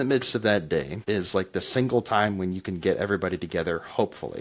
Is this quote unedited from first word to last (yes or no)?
no